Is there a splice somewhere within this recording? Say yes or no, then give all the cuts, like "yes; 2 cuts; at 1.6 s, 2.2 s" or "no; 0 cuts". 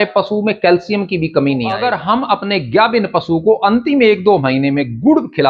yes; 1 cut; at 1.8 s